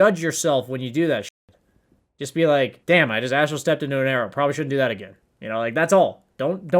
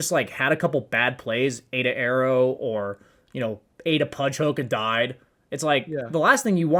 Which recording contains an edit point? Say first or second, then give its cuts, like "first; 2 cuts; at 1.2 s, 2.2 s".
first; 1 cut; at 2.8 s